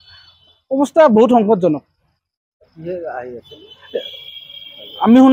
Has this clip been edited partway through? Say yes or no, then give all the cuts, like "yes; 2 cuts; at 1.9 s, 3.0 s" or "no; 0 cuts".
no; 0 cuts